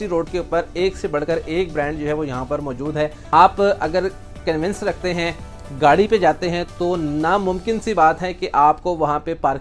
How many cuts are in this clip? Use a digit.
1